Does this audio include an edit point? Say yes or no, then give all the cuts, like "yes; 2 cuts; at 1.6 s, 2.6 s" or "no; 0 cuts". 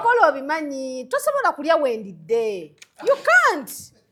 no; 0 cuts